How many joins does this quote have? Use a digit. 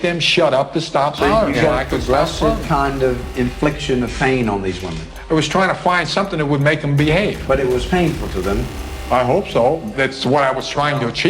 1